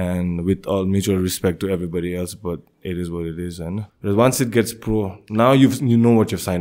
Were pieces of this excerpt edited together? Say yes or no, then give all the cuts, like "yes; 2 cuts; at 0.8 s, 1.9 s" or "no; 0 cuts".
yes; 1 cut; at 3.9 s